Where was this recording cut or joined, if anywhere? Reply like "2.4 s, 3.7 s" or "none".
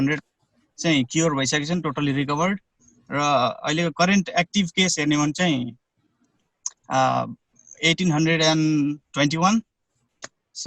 none